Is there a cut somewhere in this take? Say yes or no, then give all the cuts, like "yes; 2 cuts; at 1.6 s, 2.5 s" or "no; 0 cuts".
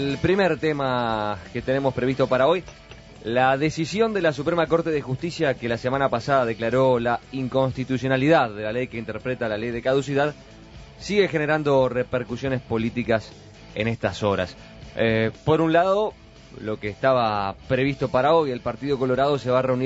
yes; 1 cut; at 14.5 s